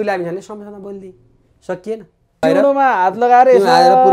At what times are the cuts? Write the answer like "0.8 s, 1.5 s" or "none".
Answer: 2.4 s